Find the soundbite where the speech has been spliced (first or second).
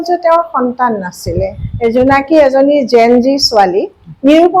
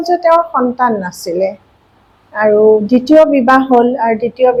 first